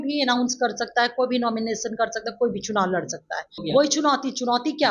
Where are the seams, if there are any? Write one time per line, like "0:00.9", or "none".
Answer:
0:03.6